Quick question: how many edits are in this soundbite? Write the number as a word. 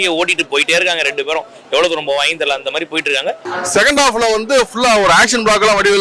one